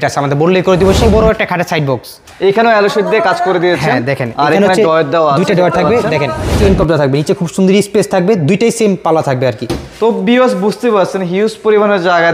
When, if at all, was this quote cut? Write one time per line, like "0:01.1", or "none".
0:01.0
0:06.5